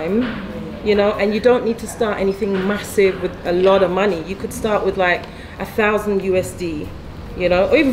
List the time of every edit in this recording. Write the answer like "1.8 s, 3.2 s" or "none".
none